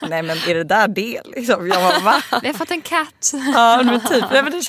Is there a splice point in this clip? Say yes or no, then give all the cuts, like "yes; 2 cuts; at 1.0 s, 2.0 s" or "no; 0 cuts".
no; 0 cuts